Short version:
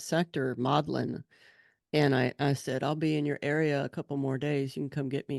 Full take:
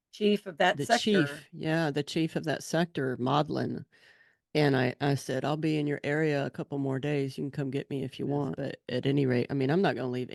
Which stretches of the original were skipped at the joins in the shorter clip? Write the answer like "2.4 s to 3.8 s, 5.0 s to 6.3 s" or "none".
none